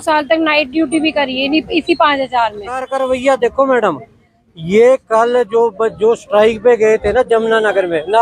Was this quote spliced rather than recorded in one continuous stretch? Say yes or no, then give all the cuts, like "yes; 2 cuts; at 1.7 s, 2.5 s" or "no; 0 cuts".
yes; 1 cut; at 2.9 s